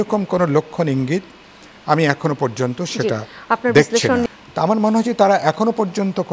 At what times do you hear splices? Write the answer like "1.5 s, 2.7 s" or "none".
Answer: 4.4 s